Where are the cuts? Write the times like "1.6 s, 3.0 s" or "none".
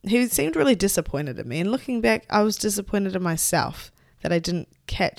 none